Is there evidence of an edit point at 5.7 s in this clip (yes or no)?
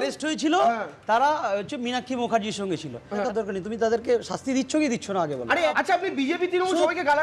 yes